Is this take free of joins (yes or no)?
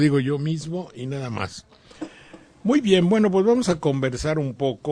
yes